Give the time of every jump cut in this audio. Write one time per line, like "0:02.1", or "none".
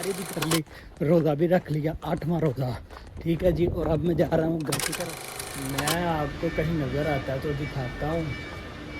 0:04.9